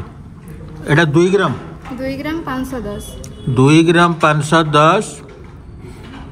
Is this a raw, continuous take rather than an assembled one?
yes; 0 cuts

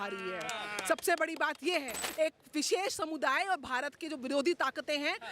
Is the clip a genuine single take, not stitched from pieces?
no; 1 cut; at 2.0 s

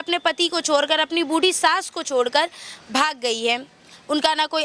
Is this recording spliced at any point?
no; 0 cuts

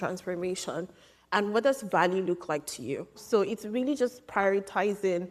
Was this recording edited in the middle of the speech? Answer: yes; 1 cut; at 3.2 s

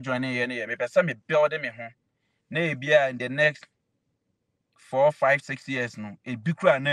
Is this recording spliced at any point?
no; 0 cuts

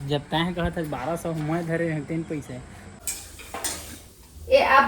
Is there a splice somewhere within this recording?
yes; 1 cut; at 3.0 s

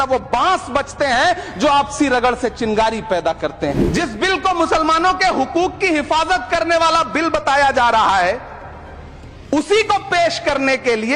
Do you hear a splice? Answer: yes; 1 cut; at 3.8 s

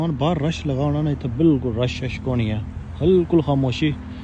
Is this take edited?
no; 0 cuts

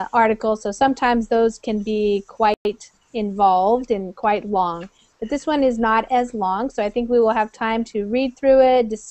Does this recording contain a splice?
no; 0 cuts

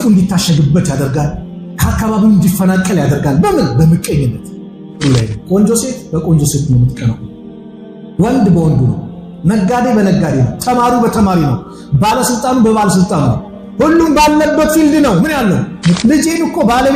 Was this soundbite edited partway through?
yes; 2 cuts; at 5.0 s, 16.0 s

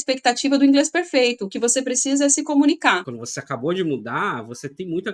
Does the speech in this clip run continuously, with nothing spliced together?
no; 1 cut; at 3.0 s

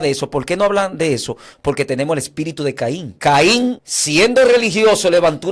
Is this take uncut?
no; 2 cuts; at 3.1 s, 3.9 s

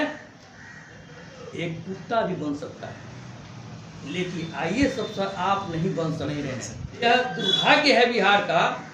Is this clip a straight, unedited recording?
no; 1 cut; at 7.0 s

